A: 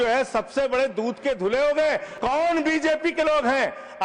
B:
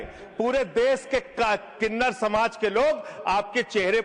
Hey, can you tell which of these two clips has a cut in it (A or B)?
A